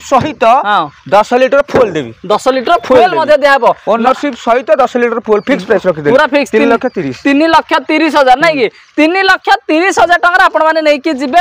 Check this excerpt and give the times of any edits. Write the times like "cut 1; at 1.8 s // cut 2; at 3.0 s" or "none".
none

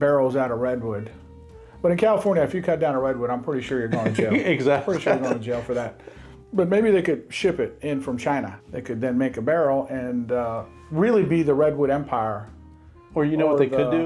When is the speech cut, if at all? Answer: cut 1; at 8.6 s

